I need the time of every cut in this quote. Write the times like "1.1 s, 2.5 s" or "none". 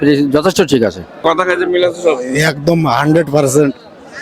1.2 s